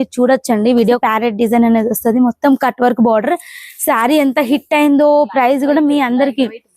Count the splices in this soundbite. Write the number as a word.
one